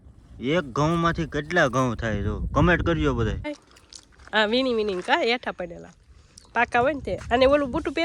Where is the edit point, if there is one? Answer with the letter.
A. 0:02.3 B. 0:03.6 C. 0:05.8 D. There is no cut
B